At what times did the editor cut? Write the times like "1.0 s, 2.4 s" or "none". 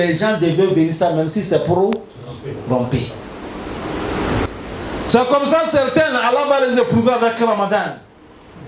4.5 s